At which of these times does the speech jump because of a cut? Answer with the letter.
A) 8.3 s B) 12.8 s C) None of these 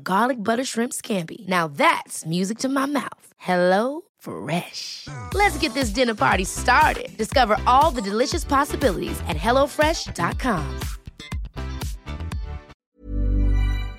B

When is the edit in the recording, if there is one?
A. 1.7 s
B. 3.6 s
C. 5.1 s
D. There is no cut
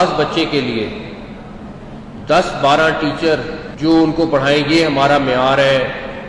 B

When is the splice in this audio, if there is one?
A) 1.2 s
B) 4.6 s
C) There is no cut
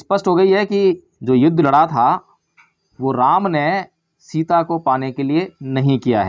C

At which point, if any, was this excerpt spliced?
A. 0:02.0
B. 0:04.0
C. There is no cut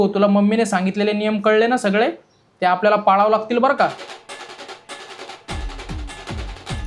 B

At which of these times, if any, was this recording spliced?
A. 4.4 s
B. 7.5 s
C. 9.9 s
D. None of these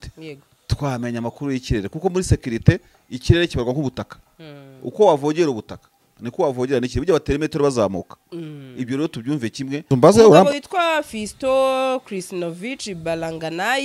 C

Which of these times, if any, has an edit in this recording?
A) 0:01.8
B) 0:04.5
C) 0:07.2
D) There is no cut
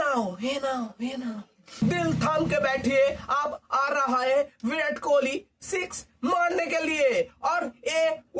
A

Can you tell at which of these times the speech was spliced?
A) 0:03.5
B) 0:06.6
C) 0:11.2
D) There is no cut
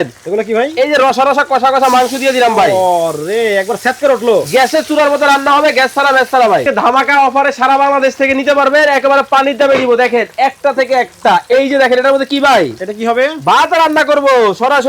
B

